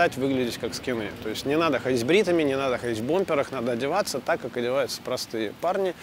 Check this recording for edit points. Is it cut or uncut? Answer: uncut